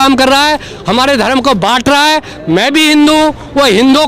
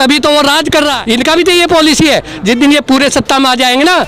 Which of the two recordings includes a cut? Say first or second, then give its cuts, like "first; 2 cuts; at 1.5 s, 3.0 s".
second; 1 cut; at 1.0 s